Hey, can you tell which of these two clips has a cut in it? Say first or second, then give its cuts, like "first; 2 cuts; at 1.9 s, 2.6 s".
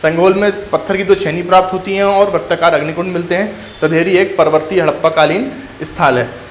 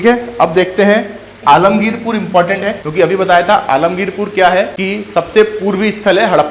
second; 3 cuts; at 1.4 s, 2.8 s, 4.8 s